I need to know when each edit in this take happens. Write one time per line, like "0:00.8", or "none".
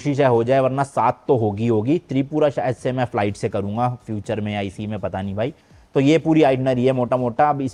none